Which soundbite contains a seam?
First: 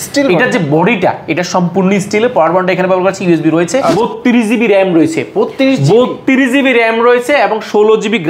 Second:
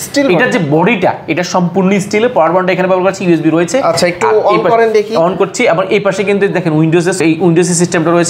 first; 1 cut; at 3.9 s

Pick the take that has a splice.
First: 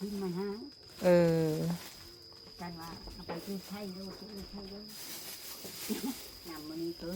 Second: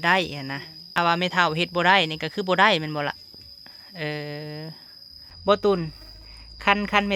second; 2 cuts; at 1.0 s, 5.3 s

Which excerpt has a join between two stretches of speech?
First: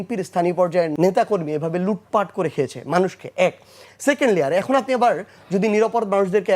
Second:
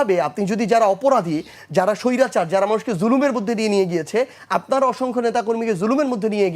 first; 1 cut; at 0.9 s

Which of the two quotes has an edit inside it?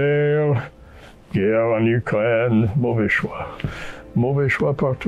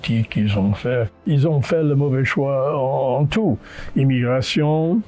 second; 1 cut; at 1.2 s

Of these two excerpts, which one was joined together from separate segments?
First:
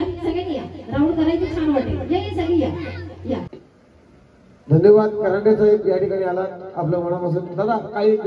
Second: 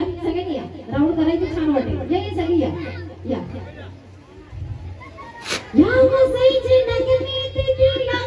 first; 1 cut; at 3.5 s

